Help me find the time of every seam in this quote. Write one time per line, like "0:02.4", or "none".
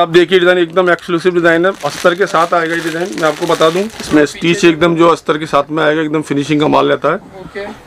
0:04.0